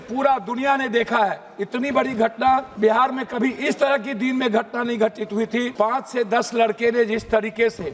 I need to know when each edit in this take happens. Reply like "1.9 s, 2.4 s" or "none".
2.7 s, 5.7 s